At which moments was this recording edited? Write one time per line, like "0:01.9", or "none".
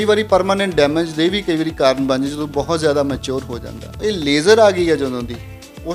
0:04.0